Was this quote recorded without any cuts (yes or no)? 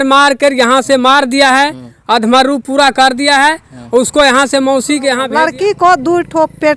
no